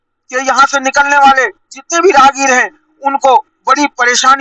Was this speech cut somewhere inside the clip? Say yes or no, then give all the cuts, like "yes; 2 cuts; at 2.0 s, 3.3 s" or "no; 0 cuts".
no; 0 cuts